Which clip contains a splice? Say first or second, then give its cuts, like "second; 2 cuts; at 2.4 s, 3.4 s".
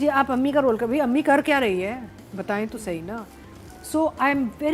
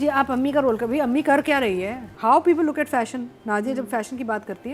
second; 1 cut; at 2.0 s